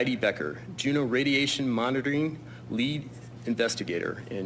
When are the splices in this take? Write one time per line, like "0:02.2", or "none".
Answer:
none